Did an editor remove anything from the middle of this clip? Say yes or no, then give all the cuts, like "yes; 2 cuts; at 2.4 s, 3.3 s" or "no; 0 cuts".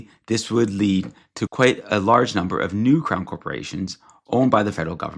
no; 0 cuts